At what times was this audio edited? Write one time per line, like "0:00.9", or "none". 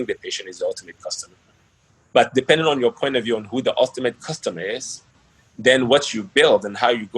none